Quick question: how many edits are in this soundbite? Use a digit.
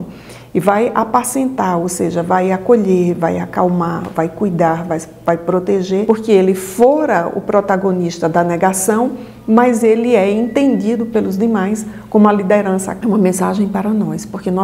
2